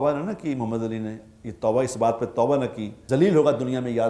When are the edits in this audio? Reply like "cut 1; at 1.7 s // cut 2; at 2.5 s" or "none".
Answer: cut 1; at 2.9 s